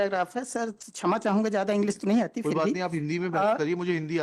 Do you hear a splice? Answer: no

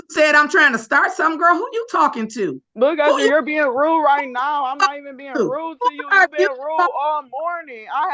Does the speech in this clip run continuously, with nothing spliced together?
no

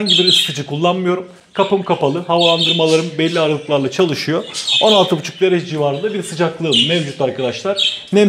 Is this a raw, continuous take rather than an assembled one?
yes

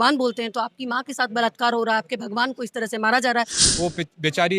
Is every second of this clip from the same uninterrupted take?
no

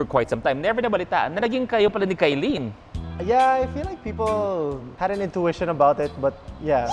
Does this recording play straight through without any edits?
yes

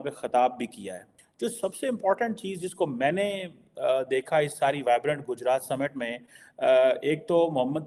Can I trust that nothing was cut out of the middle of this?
yes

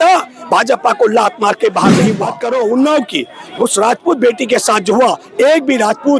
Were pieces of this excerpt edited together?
yes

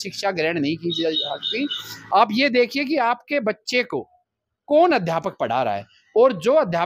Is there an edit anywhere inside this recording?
no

